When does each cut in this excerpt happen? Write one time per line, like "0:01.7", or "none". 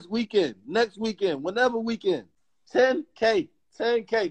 0:02.3